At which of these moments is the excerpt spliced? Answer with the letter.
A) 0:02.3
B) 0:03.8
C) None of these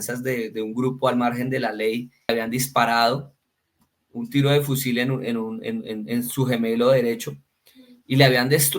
A